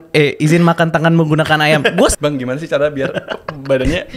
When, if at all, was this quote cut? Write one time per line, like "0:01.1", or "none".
0:02.1

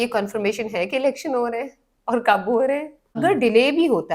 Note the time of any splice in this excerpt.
0:03.2

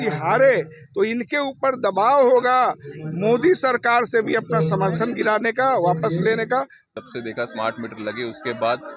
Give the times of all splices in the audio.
0:06.9

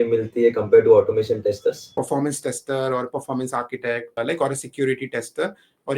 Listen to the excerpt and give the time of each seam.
0:01.9
0:04.2

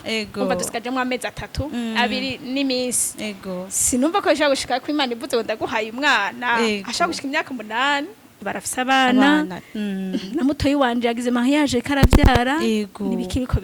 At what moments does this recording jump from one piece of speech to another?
0:08.4

